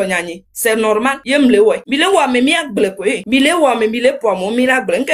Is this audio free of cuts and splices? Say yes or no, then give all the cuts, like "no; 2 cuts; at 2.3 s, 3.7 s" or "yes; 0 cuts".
no; 2 cuts; at 1.2 s, 1.8 s